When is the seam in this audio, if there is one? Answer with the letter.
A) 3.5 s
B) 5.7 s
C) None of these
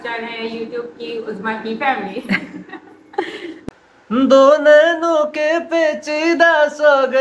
A